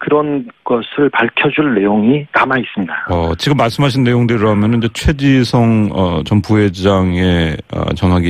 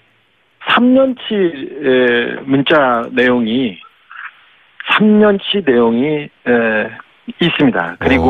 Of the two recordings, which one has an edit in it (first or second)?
second